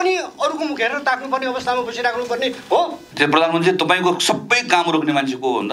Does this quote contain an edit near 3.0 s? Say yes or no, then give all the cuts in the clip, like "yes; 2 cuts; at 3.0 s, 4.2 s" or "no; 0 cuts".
yes; 1 cut; at 3.0 s